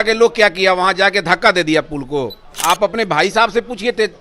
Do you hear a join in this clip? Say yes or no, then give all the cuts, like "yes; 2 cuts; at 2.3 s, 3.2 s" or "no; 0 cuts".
yes; 1 cut; at 2.5 s